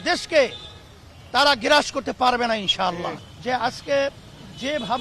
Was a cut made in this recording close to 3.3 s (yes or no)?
yes